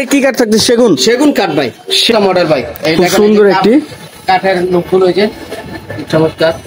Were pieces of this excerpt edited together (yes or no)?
yes